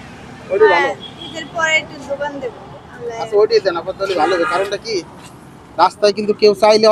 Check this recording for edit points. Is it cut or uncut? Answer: uncut